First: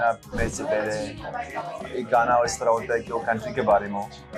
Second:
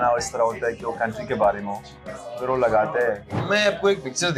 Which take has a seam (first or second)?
second